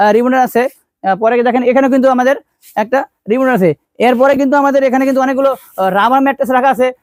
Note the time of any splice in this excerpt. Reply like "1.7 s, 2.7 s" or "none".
none